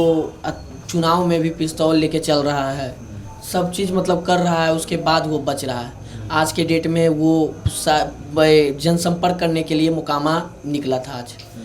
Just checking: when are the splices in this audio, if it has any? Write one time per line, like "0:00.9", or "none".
none